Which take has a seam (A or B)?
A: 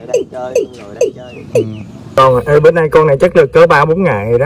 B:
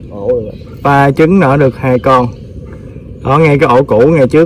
A